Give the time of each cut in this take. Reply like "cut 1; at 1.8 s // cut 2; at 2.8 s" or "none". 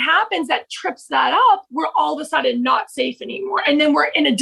none